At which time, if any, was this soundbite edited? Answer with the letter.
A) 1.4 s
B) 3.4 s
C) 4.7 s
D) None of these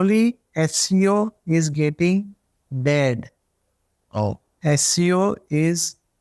D